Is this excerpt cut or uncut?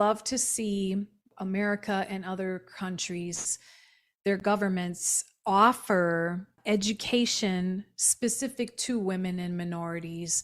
cut